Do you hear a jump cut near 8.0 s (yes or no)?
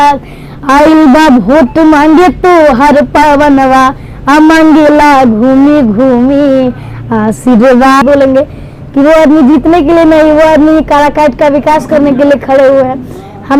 yes